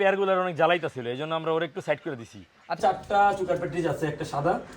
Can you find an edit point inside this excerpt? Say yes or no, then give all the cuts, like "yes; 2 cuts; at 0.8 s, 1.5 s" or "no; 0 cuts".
yes; 1 cut; at 2.8 s